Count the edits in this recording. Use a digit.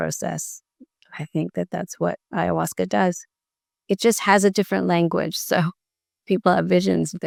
0